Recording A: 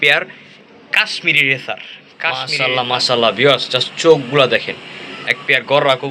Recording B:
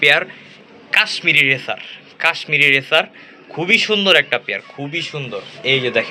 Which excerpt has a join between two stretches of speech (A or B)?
A